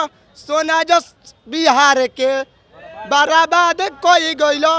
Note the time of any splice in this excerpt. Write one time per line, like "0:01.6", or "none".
none